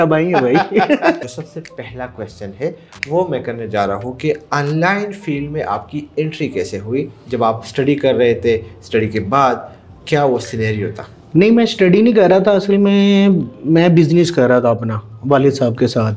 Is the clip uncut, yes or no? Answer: no